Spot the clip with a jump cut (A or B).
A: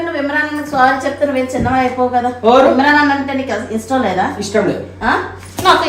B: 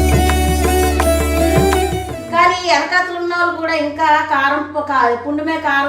B